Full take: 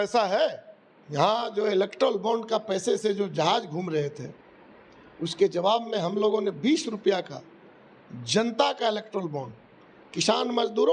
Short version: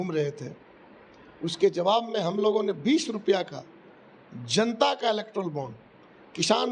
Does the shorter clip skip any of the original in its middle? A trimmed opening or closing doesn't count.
no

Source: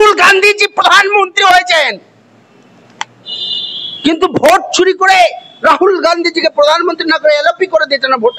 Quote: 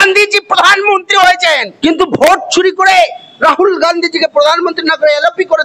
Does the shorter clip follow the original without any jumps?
no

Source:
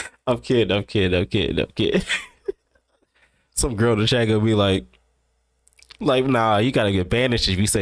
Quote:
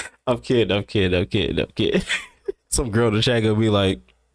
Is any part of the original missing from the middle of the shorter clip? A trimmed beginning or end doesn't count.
yes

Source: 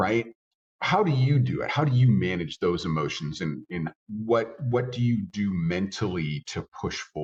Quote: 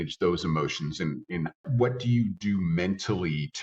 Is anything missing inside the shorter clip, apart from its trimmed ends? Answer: yes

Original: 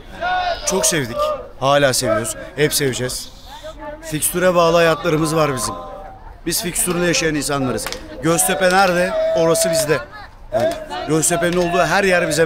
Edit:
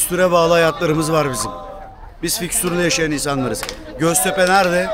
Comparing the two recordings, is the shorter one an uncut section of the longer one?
yes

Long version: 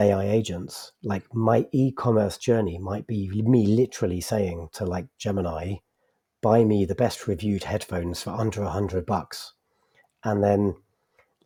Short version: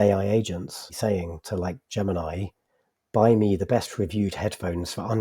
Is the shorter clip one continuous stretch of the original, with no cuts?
no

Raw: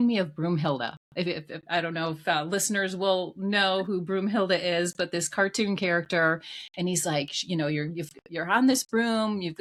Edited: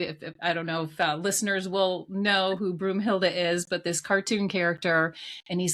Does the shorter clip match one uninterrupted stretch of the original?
yes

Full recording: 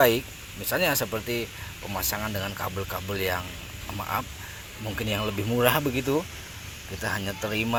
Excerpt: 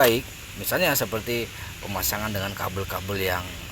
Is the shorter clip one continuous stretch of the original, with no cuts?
yes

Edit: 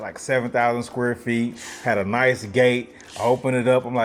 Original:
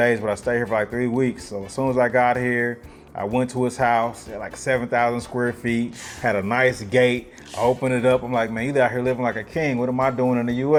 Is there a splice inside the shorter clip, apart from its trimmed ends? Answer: no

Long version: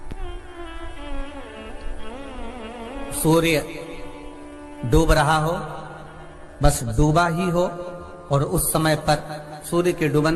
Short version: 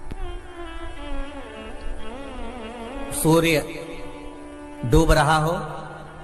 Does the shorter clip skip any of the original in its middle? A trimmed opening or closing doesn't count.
no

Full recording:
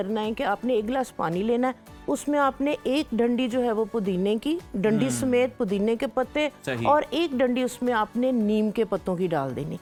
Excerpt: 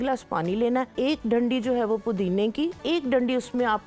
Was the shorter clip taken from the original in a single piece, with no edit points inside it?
no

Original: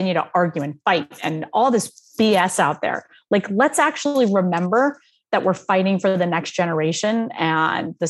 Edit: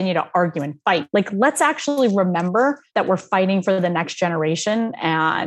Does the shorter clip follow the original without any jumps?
no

